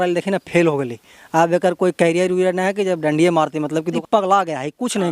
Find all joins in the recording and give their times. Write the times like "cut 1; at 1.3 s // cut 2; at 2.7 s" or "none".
cut 1; at 4.0 s